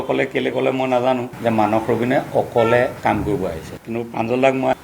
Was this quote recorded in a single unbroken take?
no; 2 cuts; at 1.3 s, 3.8 s

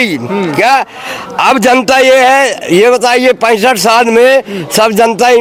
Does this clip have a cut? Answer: no; 0 cuts

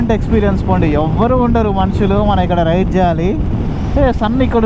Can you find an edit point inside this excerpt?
yes; 1 cut; at 3.7 s

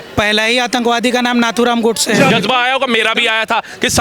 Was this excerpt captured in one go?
no; 1 cut; at 2.3 s

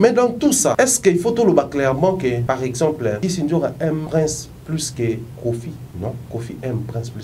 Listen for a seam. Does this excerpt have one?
yes; 5 cuts; at 0.7 s, 2.4 s, 3.2 s, 4.1 s, 5.9 s

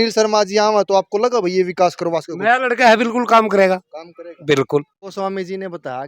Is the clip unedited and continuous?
no; 1 cut; at 5.0 s

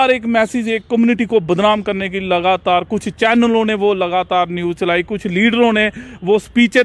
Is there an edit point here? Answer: no; 0 cuts

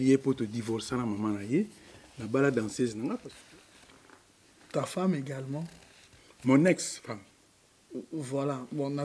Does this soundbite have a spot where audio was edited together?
yes; 1 cut; at 3.3 s

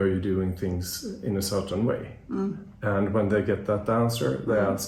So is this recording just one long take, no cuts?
yes; 0 cuts

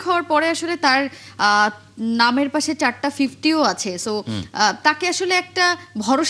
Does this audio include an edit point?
no; 0 cuts

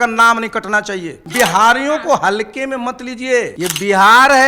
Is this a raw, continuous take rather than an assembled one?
no; 2 cuts; at 1.2 s, 3.5 s

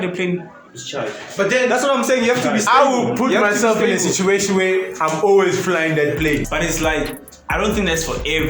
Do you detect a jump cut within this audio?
yes; 1 cut; at 6.4 s

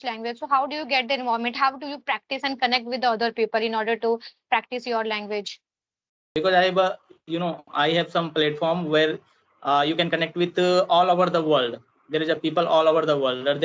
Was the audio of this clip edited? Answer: yes; 1 cut; at 6.2 s

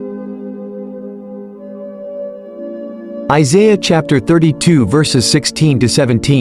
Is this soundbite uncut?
no; 1 cut; at 3.3 s

